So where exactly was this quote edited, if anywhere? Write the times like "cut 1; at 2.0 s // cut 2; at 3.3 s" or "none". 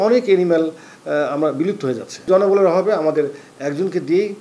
cut 1; at 2.3 s

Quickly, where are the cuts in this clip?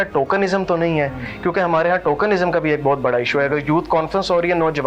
none

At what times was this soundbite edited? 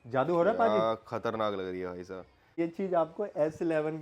cut 1; at 2.6 s

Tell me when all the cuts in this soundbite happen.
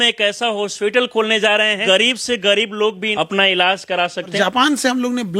cut 1; at 1.8 s // cut 2; at 3.0 s // cut 3; at 4.3 s

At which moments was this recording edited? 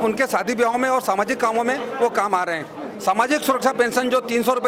none

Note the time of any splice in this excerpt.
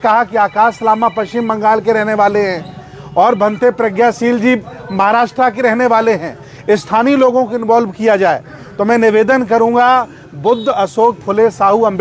none

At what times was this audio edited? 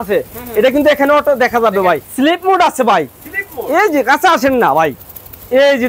cut 1; at 2.0 s

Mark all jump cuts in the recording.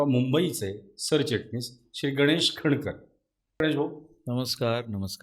cut 1; at 3.6 s

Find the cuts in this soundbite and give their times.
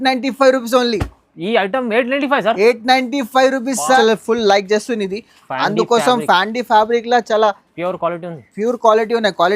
cut 1; at 4.0 s

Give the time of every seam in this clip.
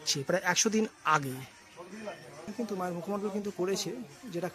cut 1; at 2.5 s

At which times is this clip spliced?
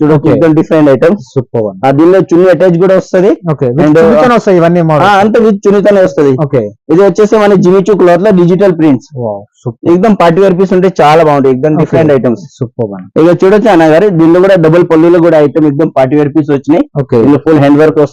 none

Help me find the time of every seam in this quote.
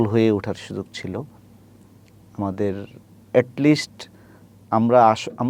none

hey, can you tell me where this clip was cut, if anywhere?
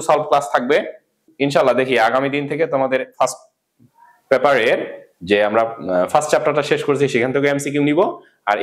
cut 1; at 1.2 s

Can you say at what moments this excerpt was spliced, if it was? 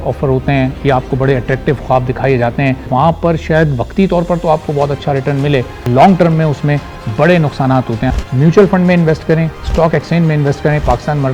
cut 1; at 2.9 s // cut 2; at 5.8 s // cut 3; at 8.2 s

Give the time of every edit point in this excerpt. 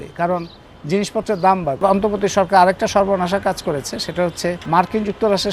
cut 1; at 1.8 s // cut 2; at 4.6 s

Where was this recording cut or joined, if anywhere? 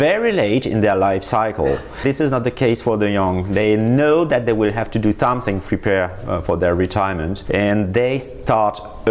cut 1; at 7.4 s

